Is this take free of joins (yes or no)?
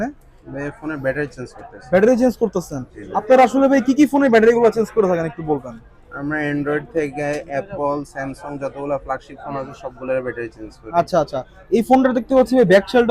yes